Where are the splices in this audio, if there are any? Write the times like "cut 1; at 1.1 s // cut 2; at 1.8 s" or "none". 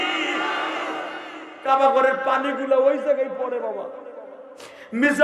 cut 1; at 1.4 s